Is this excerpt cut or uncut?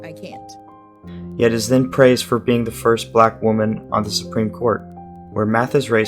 cut